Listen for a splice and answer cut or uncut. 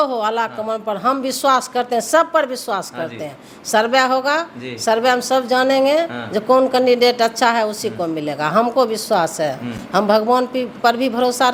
uncut